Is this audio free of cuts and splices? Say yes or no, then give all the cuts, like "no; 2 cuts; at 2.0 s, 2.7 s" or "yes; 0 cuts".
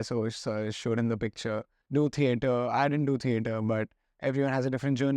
no; 1 cut; at 1.7 s